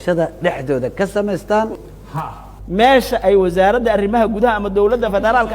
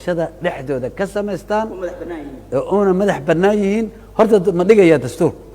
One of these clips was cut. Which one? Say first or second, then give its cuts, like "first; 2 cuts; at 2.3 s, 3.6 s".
first; 1 cut; at 2.3 s